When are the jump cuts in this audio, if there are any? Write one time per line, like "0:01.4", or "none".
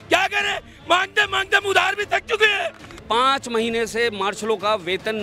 0:03.0